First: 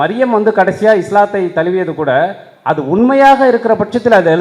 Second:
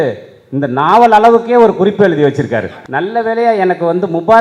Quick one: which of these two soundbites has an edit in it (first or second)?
second